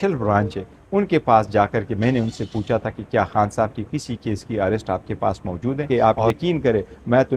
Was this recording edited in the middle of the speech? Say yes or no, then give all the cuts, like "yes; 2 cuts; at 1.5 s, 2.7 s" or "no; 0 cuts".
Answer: yes; 1 cut; at 5.9 s